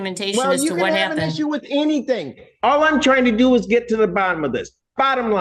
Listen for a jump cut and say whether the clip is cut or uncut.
uncut